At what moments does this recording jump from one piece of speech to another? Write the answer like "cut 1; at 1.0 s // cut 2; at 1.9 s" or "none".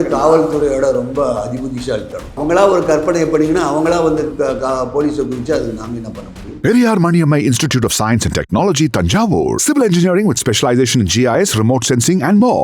cut 1; at 2.4 s // cut 2; at 6.4 s